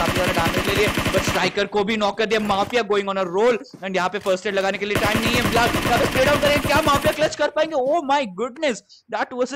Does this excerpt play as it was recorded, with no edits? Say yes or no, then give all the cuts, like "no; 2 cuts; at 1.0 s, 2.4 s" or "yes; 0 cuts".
yes; 0 cuts